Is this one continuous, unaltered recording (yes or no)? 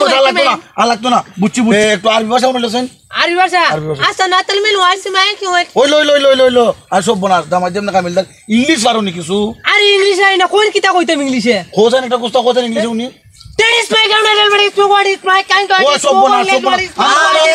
no